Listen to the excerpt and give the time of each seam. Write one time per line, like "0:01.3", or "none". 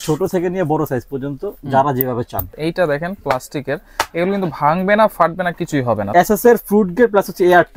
0:02.5
0:06.0